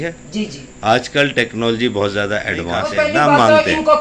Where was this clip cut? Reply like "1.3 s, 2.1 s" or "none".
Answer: 2.8 s

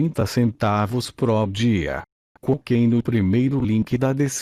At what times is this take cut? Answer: none

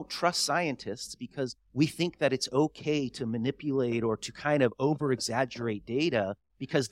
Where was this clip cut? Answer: 1.6 s

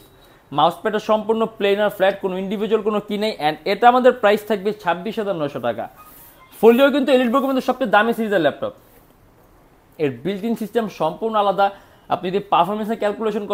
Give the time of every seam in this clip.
none

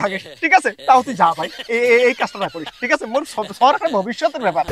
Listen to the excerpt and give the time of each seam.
none

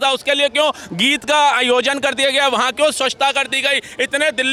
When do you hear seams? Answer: none

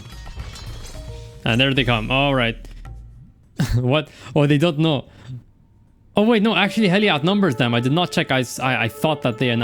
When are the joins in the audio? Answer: none

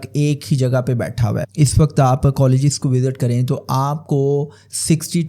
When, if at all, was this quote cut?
1.4 s

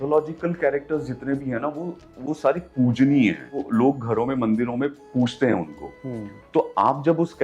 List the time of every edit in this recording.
3.6 s

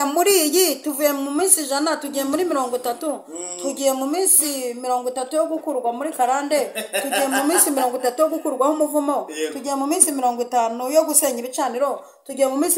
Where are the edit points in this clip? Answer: none

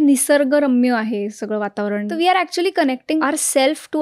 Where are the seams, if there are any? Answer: 2.1 s, 3.2 s

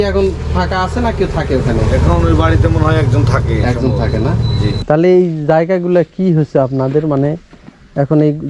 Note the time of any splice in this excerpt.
4.9 s

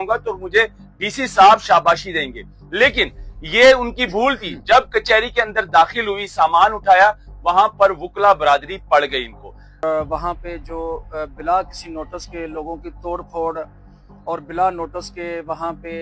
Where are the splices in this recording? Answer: 9.8 s

